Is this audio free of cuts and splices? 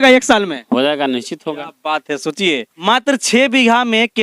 no; 1 cut; at 2.7 s

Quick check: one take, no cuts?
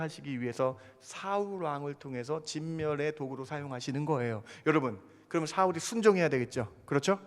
yes; 0 cuts

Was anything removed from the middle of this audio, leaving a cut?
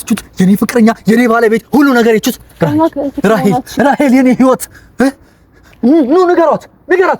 no; 0 cuts

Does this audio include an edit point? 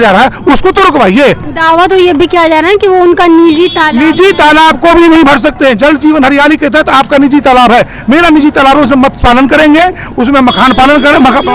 no; 0 cuts

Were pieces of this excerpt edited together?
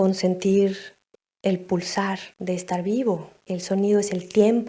yes; 2 cuts; at 2.3 s, 3.4 s

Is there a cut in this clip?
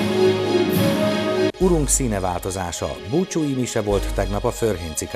no; 0 cuts

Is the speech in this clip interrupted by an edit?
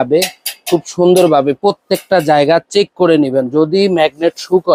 no; 0 cuts

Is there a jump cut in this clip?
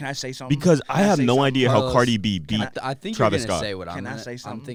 no; 0 cuts

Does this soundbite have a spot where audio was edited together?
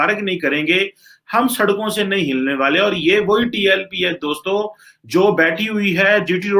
no; 0 cuts

